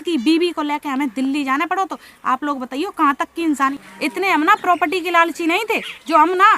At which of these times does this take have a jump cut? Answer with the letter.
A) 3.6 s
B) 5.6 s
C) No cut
A